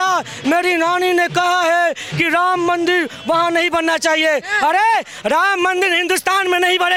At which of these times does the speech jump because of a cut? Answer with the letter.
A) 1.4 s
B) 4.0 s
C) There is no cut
C